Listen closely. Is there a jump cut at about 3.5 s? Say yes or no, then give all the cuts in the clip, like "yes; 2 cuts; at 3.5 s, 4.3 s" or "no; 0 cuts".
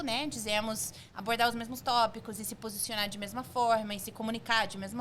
no; 0 cuts